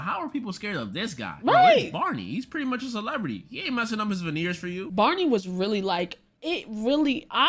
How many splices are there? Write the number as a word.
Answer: one